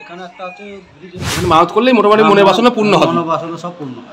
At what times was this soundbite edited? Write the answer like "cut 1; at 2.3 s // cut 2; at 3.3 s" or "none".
cut 1; at 1.3 s